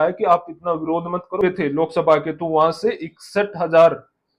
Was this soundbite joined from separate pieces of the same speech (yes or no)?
yes